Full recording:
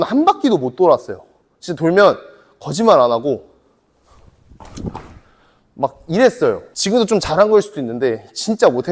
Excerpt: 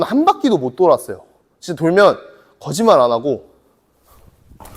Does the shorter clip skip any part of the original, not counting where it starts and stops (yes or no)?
no